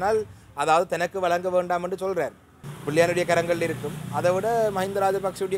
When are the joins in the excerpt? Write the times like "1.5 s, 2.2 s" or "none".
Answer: 2.7 s

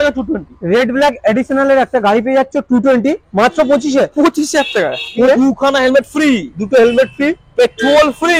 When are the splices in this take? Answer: 5.3 s

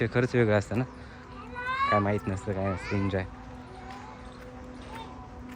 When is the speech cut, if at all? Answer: none

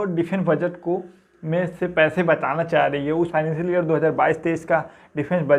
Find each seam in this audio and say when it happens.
3.3 s

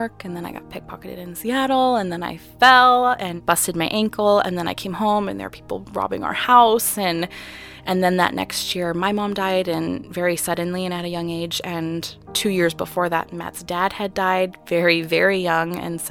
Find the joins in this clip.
3.3 s, 12.2 s

